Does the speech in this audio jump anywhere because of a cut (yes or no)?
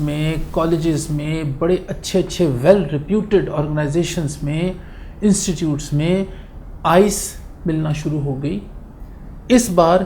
no